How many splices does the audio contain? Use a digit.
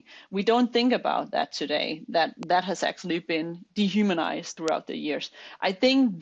2